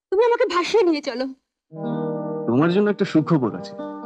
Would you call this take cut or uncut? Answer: uncut